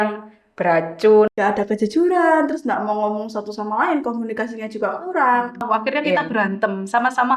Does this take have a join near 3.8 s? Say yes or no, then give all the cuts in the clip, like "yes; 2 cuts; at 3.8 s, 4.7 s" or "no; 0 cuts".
no; 2 cuts; at 1.3 s, 5.6 s